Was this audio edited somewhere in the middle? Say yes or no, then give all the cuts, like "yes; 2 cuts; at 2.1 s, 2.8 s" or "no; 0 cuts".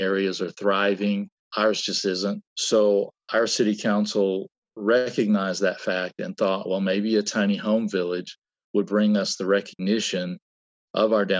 yes; 2 cuts; at 1.4 s, 2.5 s